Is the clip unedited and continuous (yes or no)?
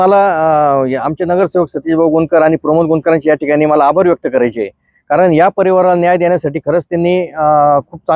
yes